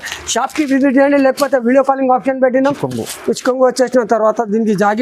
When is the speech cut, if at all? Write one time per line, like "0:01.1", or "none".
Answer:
0:02.8

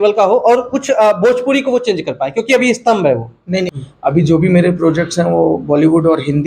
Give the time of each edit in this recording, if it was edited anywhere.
0:03.8

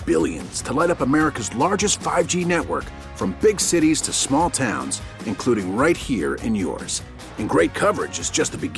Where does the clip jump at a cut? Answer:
none

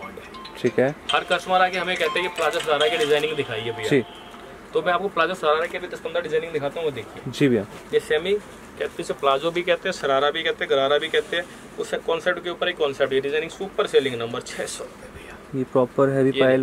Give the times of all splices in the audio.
0:07.8

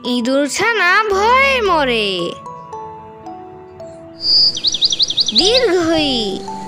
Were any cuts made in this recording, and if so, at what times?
none

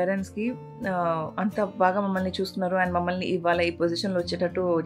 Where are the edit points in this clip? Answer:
none

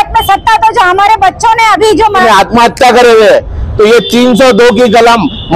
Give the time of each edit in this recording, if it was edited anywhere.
0:02.2

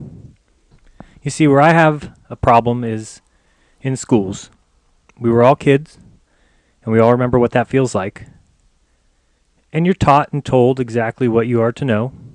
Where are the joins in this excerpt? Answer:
0:07.1

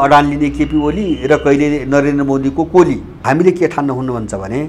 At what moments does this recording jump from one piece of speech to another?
0:03.2

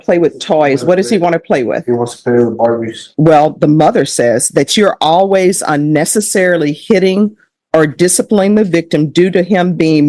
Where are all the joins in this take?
0:03.0

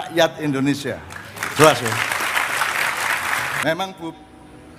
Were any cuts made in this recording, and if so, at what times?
0:03.6

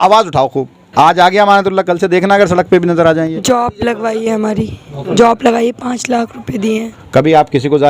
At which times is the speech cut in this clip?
0:03.4
0:06.9

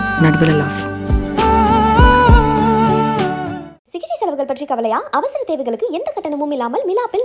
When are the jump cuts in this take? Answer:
none

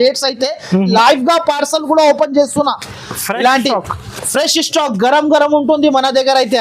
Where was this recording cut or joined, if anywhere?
0:00.9

